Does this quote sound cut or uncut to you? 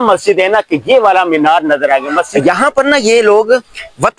cut